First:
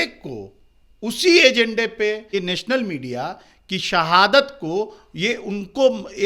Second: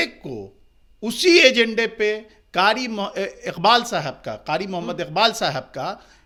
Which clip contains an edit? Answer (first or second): first